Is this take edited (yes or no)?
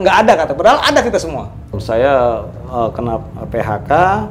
yes